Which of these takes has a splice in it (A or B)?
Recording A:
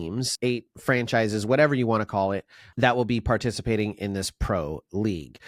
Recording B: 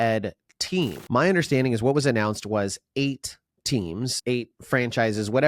B